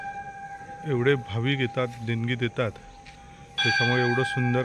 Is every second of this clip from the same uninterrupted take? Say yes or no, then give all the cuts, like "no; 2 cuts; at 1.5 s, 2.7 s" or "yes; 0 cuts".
yes; 0 cuts